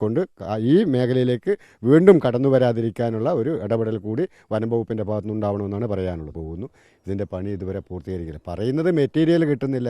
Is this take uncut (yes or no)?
no